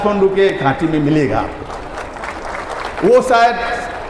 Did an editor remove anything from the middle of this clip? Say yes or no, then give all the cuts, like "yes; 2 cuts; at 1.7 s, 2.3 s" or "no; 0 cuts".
no; 0 cuts